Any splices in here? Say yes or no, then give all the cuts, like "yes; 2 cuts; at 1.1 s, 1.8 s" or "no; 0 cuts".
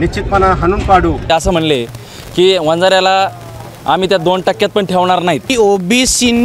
yes; 2 cuts; at 1.3 s, 5.5 s